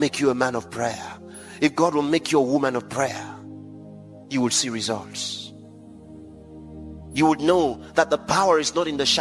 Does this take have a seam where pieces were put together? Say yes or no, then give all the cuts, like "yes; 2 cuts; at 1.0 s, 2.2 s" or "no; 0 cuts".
no; 0 cuts